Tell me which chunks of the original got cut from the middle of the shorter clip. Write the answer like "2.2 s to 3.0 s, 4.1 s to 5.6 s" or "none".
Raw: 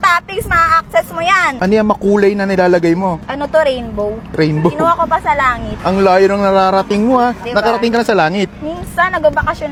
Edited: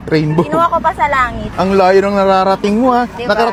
none